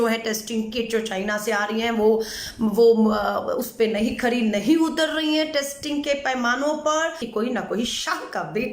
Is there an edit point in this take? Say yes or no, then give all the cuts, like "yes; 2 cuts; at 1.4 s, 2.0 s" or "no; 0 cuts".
yes; 1 cut; at 7.2 s